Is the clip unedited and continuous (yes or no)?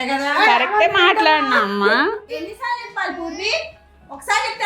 no